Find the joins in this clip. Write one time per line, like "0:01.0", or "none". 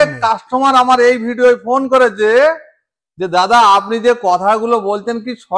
none